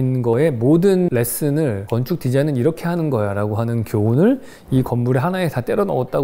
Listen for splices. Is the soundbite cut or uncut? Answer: uncut